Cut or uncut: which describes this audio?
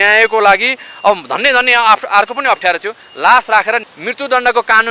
cut